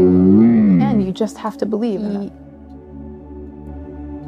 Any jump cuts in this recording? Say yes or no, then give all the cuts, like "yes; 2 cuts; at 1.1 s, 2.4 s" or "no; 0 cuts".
yes; 2 cuts; at 0.9 s, 2.0 s